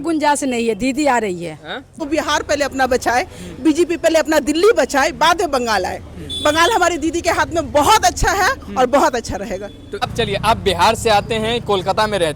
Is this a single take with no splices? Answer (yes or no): no